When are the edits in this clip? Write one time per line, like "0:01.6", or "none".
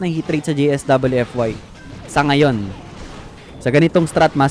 none